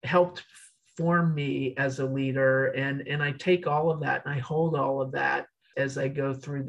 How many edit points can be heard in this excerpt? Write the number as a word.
one